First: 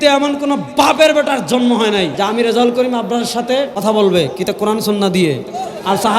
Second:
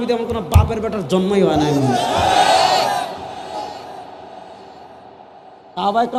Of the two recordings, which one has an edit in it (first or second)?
first